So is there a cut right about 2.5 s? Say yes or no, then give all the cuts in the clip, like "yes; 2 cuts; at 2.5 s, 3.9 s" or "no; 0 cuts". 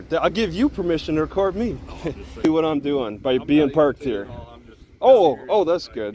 yes; 1 cut; at 2.5 s